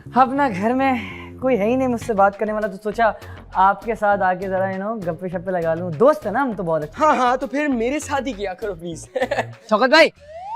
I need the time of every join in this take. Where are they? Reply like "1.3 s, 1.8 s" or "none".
9.6 s